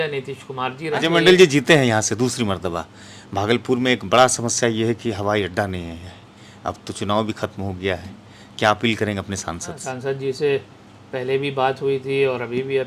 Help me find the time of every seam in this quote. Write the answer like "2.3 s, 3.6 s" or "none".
1.0 s, 9.9 s